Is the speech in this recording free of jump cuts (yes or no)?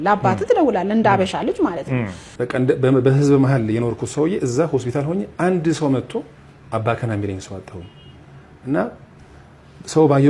no